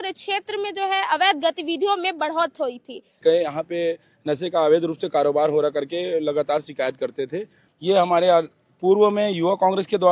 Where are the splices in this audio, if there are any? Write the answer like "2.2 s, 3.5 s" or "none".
3.2 s, 7.6 s